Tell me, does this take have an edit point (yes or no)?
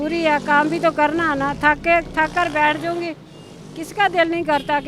no